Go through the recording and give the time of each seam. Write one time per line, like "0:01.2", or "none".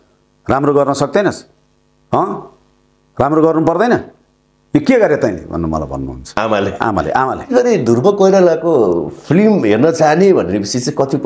0:07.5